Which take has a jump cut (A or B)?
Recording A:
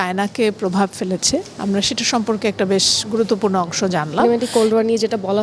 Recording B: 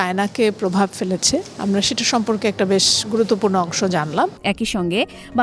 A